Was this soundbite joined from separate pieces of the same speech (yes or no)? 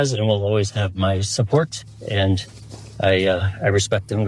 no